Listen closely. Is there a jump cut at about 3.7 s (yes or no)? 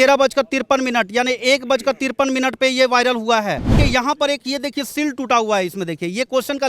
yes